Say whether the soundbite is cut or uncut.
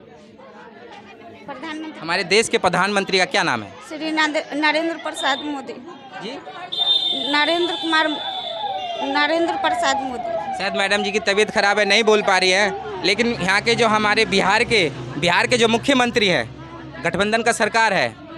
uncut